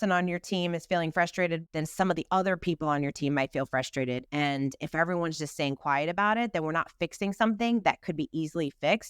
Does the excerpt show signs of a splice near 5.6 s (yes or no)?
no